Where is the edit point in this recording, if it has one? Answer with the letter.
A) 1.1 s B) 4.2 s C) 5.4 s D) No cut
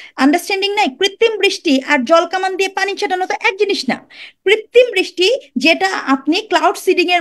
D